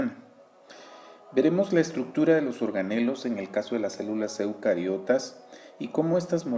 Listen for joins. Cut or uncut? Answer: cut